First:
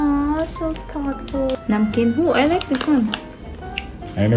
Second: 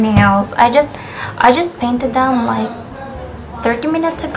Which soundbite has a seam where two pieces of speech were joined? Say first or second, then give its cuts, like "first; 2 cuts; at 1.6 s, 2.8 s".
first; 1 cut; at 1.5 s